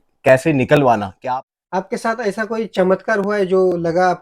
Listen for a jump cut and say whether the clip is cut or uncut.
cut